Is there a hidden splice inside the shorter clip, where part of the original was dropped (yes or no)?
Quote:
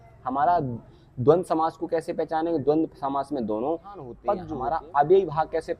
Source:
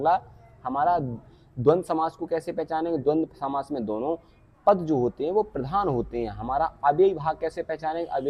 yes